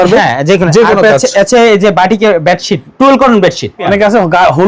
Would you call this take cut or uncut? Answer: cut